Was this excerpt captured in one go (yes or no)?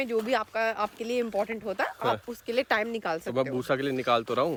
yes